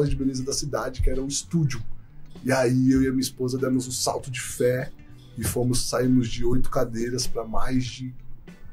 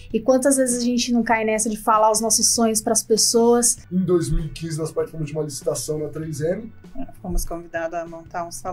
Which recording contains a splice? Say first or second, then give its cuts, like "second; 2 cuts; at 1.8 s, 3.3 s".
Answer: second; 1 cut; at 3.8 s